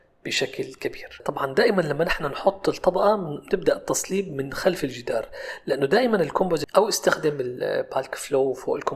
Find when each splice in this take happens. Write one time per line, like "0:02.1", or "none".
0:01.1
0:06.7